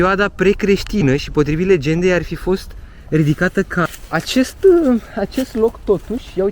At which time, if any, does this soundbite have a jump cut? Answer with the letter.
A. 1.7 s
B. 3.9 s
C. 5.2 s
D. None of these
B